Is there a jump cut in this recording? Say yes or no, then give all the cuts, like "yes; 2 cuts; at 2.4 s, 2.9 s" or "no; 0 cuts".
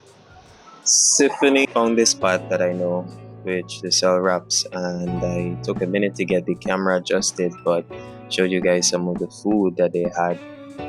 yes; 1 cut; at 1.6 s